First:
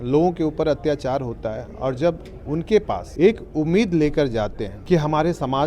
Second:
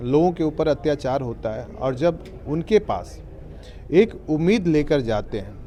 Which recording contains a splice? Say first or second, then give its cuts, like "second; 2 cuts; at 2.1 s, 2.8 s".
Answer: first; 2 cuts; at 3.0 s, 4.7 s